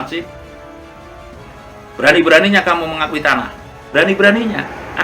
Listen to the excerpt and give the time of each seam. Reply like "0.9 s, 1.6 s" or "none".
3.8 s